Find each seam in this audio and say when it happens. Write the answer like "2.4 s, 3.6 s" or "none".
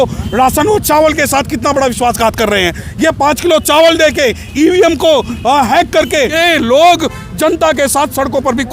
6.4 s

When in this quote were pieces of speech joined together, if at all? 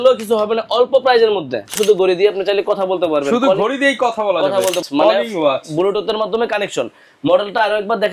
1.8 s, 4.8 s

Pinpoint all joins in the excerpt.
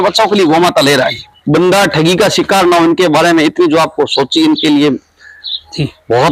1.3 s

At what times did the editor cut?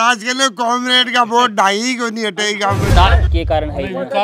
3.2 s

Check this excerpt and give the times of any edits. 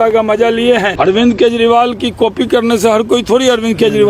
0.9 s

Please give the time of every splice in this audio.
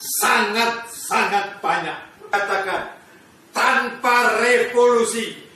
2.3 s

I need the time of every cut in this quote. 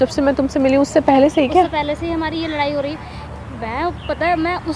none

